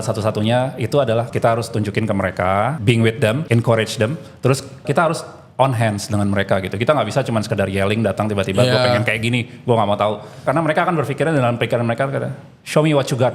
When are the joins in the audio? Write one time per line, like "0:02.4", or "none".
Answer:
0:01.3
0:03.2
0:04.8
0:10.5

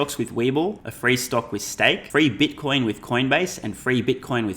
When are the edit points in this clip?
0:00.9
0:02.0

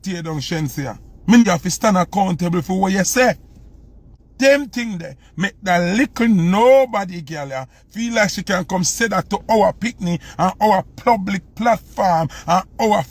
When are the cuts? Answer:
0:01.4
0:04.1

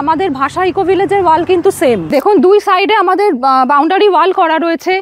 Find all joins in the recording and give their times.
0:02.0

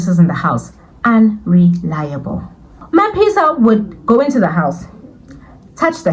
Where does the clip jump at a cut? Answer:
0:02.8

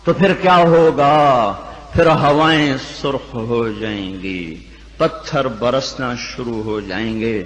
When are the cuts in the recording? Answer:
none

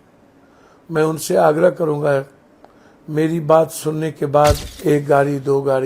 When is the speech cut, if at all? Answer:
0:04.7

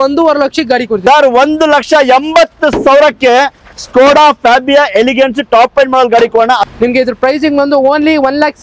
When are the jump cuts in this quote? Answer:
0:01.0
0:06.6

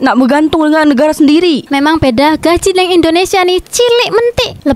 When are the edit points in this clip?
0:01.7

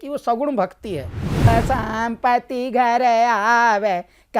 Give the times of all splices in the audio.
0:01.5

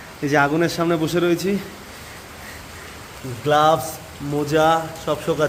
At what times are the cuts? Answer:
none

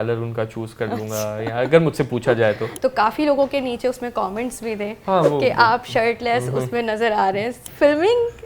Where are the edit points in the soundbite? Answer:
0:02.7
0:07.5

